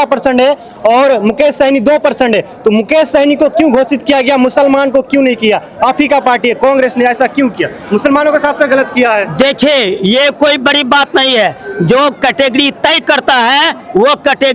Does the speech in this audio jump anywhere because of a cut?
no; 0 cuts

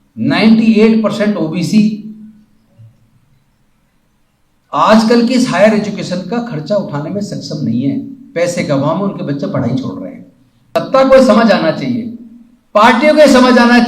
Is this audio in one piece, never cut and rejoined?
no; 1 cut; at 10.7 s

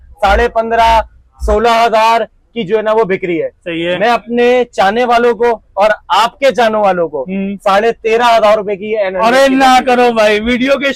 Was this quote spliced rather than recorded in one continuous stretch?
no; 0 cuts

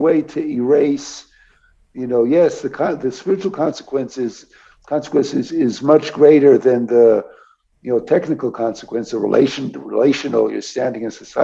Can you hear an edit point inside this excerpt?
no; 0 cuts

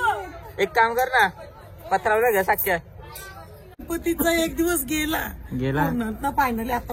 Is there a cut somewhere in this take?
yes; 1 cut; at 3.8 s

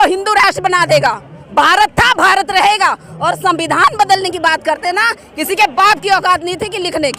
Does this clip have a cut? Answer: no; 0 cuts

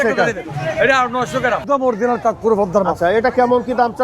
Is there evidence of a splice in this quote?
yes; 1 cut; at 1.6 s

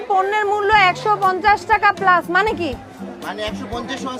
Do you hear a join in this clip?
yes; 1 cut; at 1.6 s

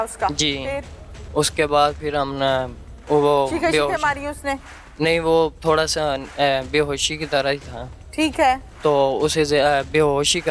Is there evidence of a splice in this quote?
no; 0 cuts

